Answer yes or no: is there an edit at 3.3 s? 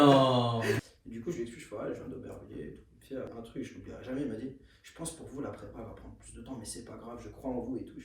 yes